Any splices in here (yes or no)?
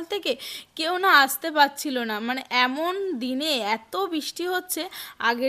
no